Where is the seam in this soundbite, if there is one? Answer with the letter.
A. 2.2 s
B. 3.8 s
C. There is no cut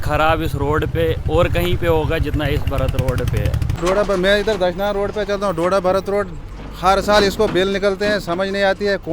B